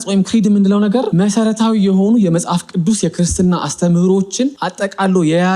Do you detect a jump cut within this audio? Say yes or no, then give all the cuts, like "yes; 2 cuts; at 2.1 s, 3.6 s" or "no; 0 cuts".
yes; 2 cuts; at 1.1 s, 4.6 s